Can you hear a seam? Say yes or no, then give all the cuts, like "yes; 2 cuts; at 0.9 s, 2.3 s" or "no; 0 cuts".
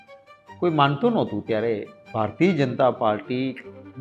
no; 0 cuts